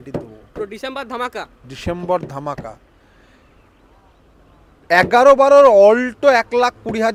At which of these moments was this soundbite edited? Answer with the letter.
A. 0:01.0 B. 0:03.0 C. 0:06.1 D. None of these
D